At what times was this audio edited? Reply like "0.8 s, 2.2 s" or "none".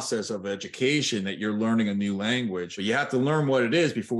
2.7 s